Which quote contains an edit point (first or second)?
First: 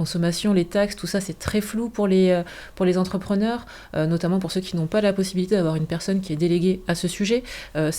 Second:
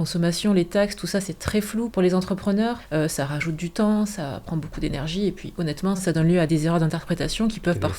second